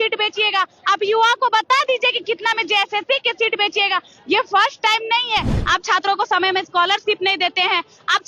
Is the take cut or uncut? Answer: cut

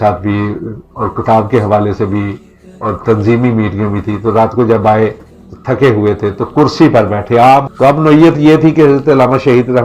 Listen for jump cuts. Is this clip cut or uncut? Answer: cut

